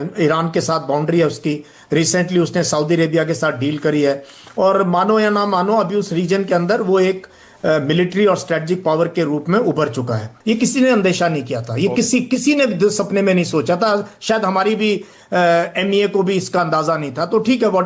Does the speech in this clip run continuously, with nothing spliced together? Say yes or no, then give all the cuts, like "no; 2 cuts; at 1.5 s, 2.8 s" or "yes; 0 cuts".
no; 1 cut; at 10.3 s